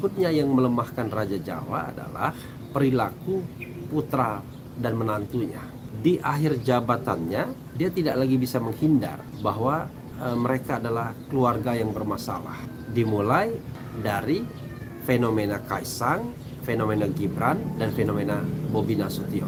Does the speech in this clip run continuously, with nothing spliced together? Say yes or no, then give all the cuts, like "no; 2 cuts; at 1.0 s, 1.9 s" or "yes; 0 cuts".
yes; 0 cuts